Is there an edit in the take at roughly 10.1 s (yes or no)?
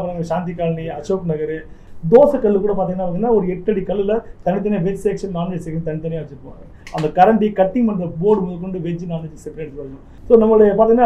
yes